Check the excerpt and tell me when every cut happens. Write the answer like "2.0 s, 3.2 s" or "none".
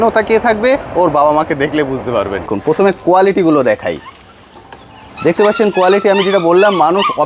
2.5 s